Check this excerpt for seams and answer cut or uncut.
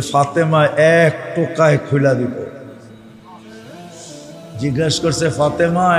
uncut